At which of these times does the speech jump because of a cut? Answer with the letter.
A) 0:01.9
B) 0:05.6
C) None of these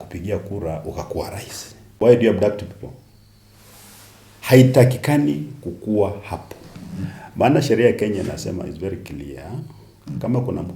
A